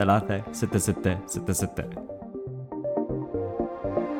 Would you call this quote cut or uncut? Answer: cut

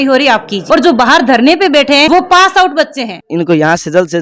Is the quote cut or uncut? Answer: cut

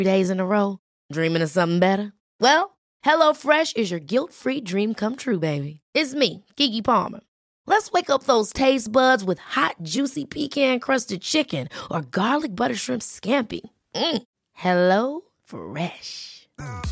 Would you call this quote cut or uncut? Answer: uncut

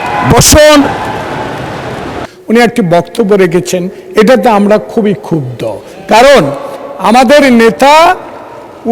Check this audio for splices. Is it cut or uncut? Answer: cut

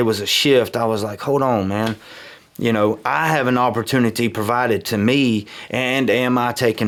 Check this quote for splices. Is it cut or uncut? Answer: uncut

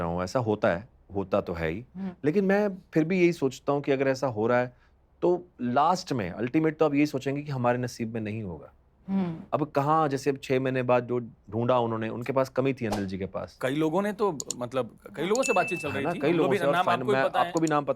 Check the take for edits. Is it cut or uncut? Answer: uncut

